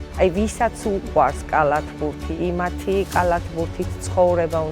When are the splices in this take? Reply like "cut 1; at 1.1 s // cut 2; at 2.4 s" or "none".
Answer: cut 1; at 2.2 s

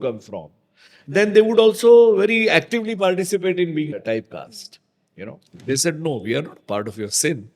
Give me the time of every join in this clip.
cut 1; at 3.9 s // cut 2; at 5.5 s

